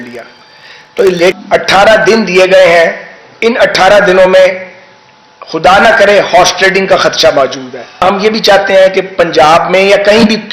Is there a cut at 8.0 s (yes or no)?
yes